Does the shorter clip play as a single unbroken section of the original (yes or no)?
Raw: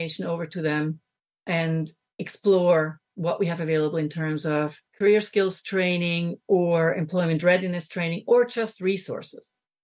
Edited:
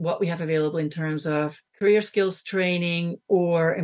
yes